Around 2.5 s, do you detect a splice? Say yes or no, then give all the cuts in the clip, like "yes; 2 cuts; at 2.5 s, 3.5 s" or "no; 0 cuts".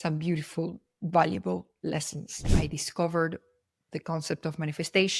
yes; 1 cut; at 2.5 s